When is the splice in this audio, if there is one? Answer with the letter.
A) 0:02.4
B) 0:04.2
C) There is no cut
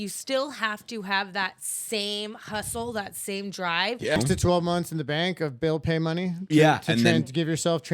B